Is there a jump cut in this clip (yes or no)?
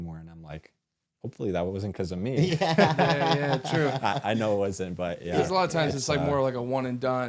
no